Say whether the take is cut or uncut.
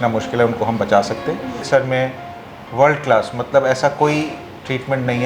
cut